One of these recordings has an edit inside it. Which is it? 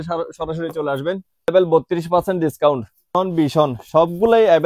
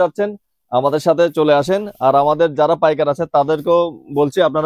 first; 2 cuts; at 1.5 s, 3.1 s

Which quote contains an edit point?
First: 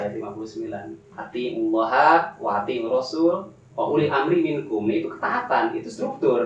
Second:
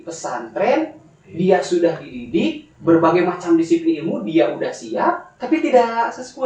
second; 1 cut; at 5.3 s

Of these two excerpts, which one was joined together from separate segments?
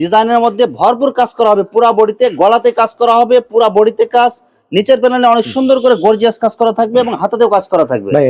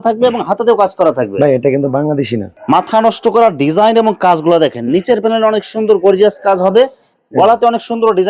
second; 1 cut; at 2.5 s

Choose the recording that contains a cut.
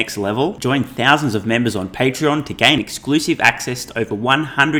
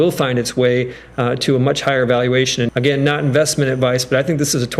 second; 1 cut; at 2.7 s

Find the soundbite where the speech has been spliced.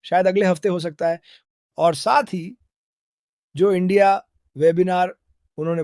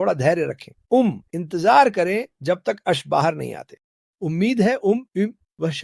first; 1 cut; at 1.3 s

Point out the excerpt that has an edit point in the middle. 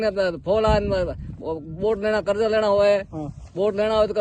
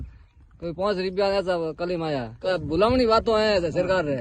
second; 1 cut; at 2.4 s

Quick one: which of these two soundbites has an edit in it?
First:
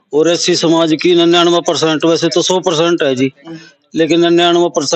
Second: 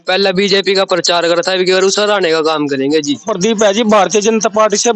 second; 1 cut; at 3.3 s

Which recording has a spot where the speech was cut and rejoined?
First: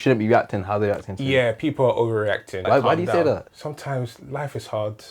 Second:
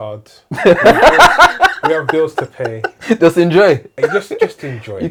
first; 2 cuts; at 2.5 s, 3.5 s

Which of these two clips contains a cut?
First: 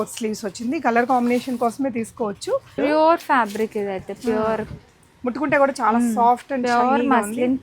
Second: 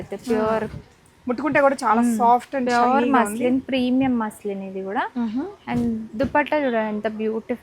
first; 1 cut; at 2.7 s

